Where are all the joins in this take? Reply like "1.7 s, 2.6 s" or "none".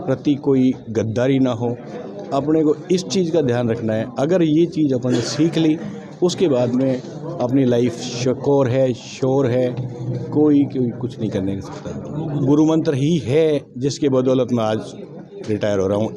12.4 s